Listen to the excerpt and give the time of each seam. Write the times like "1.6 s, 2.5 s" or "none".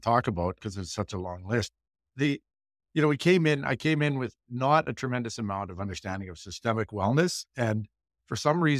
none